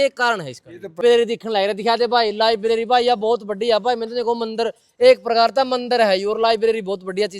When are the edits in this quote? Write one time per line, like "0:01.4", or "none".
0:01.0